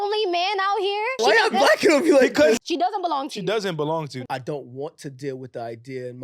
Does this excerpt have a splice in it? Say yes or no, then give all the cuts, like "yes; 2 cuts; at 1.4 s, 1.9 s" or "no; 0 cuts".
yes; 3 cuts; at 1.1 s, 2.6 s, 4.1 s